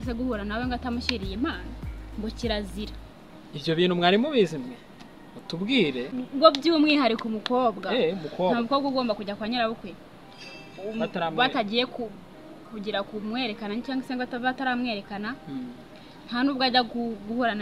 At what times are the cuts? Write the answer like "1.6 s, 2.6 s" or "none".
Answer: 6.1 s